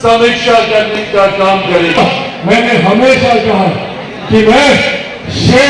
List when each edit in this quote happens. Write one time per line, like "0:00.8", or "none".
0:02.0